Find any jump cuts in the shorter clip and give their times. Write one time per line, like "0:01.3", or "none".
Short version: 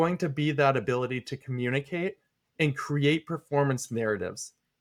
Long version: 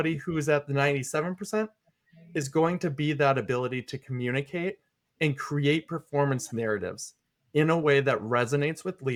none